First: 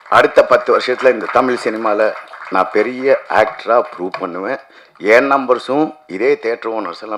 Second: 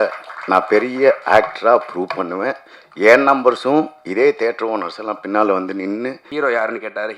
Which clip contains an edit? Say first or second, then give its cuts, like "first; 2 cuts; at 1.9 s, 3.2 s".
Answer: second; 1 cut; at 6.2 s